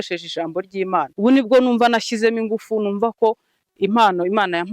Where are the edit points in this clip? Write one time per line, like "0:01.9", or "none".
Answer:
0:01.1